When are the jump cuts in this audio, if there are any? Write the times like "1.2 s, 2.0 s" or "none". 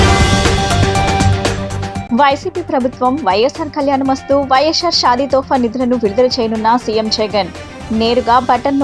1.9 s